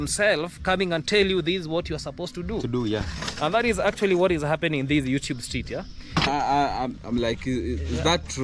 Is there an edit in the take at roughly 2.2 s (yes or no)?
no